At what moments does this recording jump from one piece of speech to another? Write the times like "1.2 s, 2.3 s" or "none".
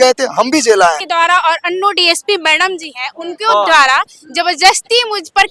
1.0 s